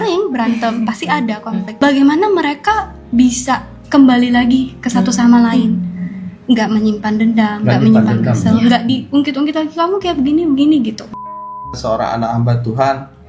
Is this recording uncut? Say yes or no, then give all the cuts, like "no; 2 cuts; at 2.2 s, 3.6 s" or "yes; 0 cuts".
no; 2 cuts; at 1.7 s, 11.5 s